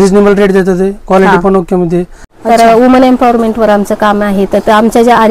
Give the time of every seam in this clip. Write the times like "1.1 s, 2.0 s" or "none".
2.2 s